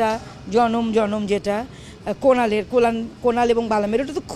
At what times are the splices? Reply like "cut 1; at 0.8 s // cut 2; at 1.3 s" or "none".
none